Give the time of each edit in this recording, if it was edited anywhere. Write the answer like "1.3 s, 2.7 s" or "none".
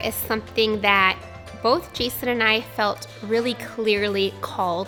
none